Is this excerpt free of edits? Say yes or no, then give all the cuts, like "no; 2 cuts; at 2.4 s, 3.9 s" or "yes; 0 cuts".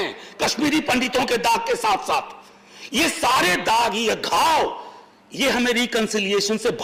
yes; 0 cuts